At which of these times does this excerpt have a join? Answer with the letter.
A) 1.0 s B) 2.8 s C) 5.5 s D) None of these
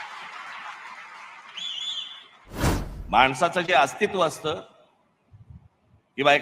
B